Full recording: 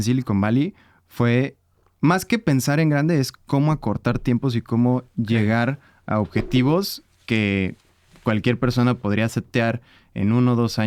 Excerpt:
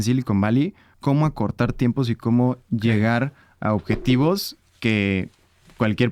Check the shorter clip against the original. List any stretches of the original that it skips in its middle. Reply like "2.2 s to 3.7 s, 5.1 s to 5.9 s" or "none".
0.9 s to 3.4 s